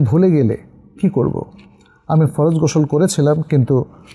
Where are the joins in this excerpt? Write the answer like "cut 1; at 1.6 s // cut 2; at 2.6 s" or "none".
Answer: none